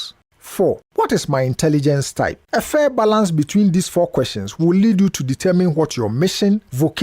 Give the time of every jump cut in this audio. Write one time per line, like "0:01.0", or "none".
0:02.4